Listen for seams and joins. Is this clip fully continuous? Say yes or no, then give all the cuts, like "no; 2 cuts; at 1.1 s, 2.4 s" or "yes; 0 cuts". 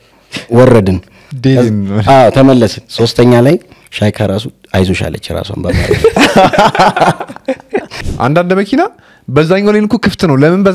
no; 1 cut; at 8.0 s